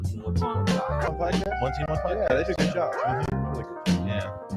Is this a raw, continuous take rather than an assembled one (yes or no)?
no